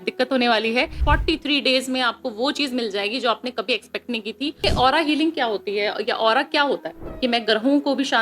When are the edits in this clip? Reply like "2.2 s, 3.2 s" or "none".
1.0 s, 4.6 s, 7.0 s